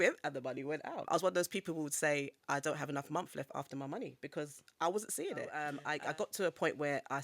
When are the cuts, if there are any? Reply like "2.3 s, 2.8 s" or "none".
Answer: 1.0 s, 5.8 s

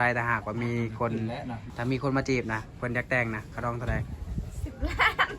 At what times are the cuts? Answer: 1.7 s

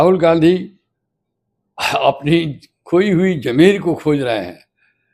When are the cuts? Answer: none

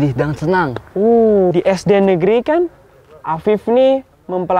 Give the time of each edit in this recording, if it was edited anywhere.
1.5 s

